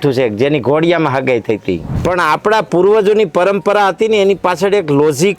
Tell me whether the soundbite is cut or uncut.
cut